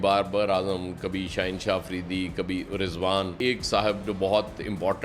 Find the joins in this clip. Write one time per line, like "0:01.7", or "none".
0:03.3